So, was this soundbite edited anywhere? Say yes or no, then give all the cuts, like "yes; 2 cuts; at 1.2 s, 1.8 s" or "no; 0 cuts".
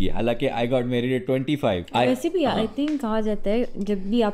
yes; 1 cut; at 1.9 s